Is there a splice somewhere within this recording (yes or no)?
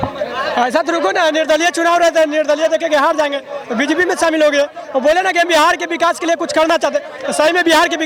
no